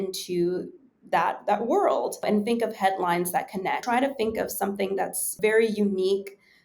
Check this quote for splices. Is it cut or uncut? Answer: cut